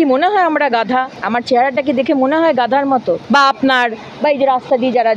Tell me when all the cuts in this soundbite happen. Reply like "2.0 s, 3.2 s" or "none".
1.2 s, 3.2 s